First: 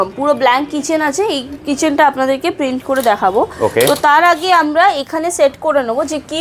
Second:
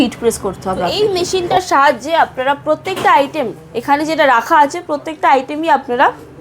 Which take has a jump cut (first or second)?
second